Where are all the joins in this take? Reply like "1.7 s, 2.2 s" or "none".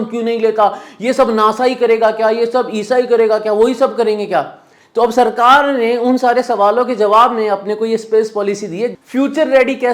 9.0 s